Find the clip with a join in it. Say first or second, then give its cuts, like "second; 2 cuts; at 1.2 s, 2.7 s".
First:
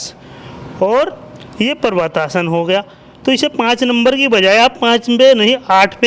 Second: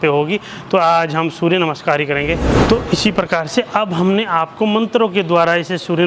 second; 1 cut; at 2.6 s